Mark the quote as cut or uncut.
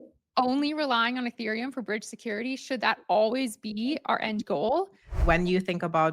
cut